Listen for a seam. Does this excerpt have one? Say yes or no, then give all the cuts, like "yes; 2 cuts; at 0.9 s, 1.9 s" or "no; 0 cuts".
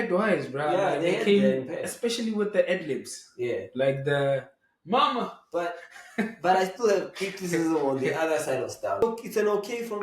yes; 1 cut; at 9.0 s